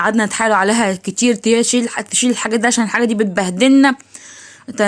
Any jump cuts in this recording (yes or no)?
no